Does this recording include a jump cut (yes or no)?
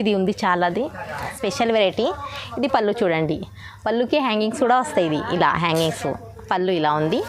yes